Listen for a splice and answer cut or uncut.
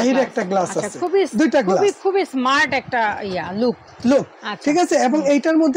uncut